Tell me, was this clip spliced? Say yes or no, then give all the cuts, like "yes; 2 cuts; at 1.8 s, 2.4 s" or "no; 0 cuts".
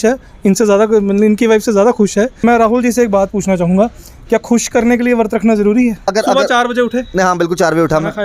yes; 2 cuts; at 2.4 s, 6.1 s